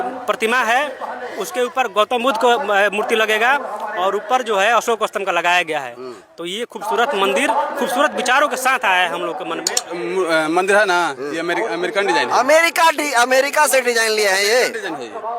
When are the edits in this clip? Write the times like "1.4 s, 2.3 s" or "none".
9.8 s